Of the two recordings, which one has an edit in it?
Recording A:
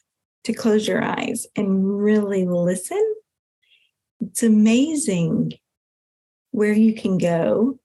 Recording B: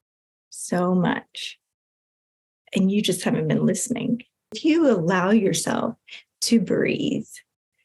B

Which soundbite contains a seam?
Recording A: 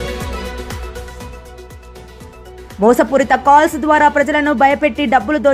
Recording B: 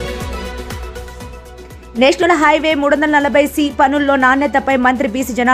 B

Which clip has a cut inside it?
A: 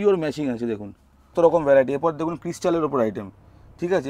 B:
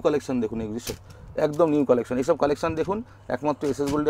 A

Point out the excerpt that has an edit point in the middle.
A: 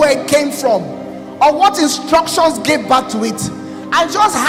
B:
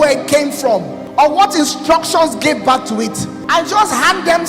B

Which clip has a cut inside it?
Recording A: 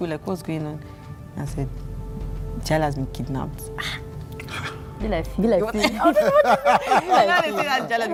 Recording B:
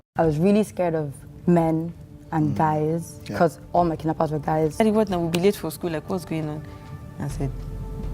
B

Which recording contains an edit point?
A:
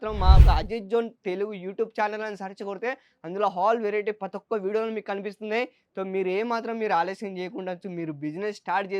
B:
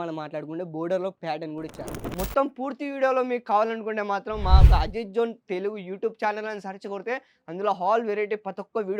B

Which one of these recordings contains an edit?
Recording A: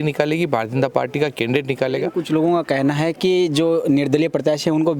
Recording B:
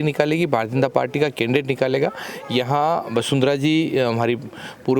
A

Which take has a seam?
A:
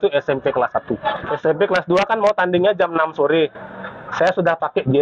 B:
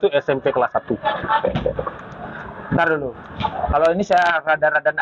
A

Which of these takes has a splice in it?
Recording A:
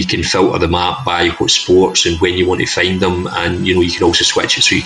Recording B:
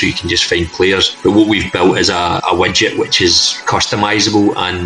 B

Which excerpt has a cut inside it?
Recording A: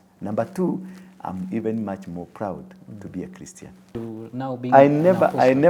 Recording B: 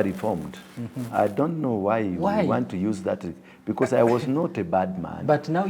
A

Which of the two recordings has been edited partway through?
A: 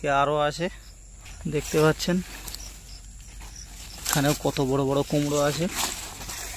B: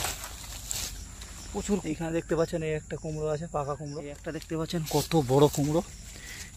B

